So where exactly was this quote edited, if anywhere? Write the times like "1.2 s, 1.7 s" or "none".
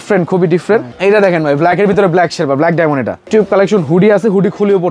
0.9 s, 3.2 s